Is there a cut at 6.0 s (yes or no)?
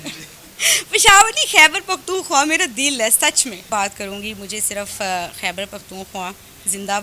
no